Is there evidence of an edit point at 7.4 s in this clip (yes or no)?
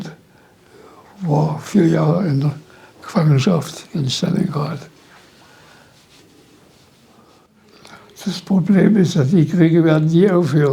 yes